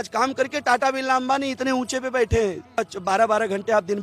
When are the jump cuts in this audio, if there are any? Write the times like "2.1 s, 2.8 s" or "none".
2.8 s

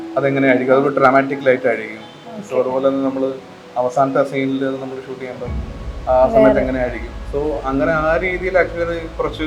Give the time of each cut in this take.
none

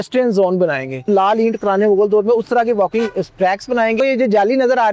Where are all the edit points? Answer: 1.1 s, 3.9 s

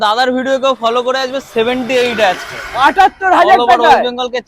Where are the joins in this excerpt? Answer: none

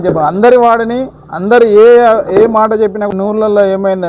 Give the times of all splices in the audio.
3.1 s

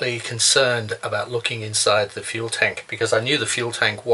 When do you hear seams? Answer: 2.8 s

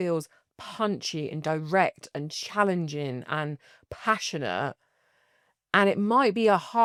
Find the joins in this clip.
none

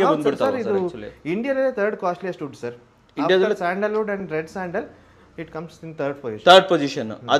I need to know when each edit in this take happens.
none

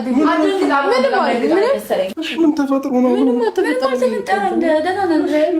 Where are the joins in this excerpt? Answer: 2.2 s

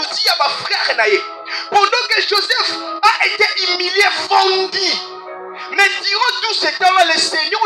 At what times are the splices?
none

